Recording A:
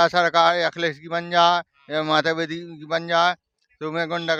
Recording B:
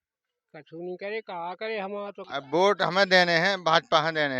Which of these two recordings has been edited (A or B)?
B